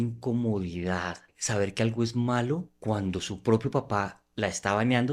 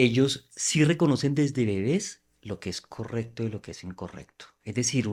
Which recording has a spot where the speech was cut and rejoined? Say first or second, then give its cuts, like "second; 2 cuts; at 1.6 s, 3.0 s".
first; 3 cuts; at 1.4 s, 2.7 s, 4.2 s